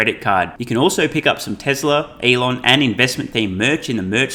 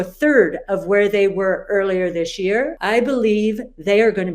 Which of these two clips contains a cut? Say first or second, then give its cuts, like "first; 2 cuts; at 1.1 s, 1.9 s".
second; 1 cut; at 2.8 s